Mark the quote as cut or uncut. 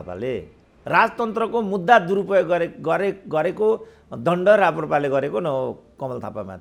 uncut